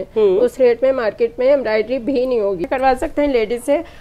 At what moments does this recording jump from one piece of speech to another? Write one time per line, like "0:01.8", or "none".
0:02.6

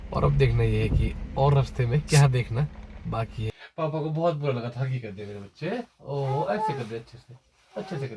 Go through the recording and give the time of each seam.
0:03.4

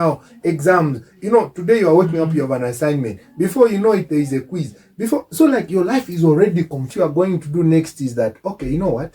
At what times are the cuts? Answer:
0:06.9

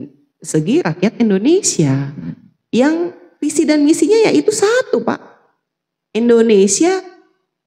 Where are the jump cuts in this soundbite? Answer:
none

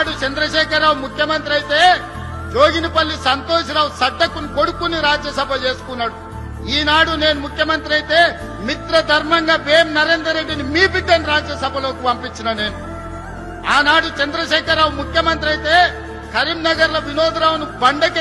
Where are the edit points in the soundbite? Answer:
none

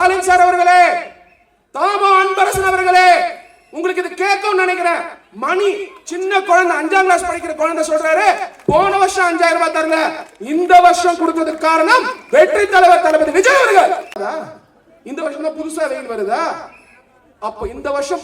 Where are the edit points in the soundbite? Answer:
0:14.2

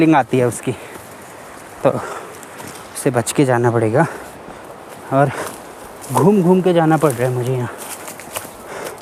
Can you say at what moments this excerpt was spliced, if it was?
none

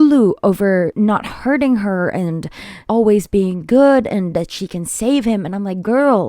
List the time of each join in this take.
0:00.9
0:02.8

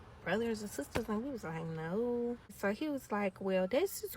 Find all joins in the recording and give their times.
0:02.5

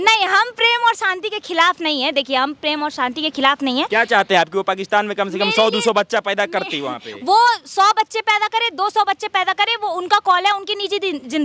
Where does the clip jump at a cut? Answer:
none

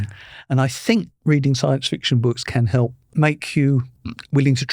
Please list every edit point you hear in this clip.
0:03.1

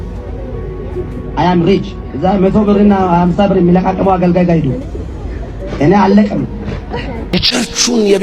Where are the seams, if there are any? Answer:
0:02.0
0:07.5

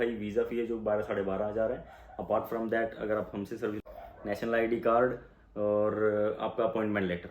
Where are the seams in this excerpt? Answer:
0:03.8

